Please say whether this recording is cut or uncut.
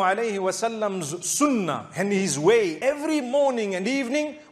cut